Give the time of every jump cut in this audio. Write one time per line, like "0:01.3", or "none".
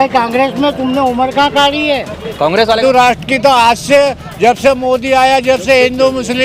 0:02.8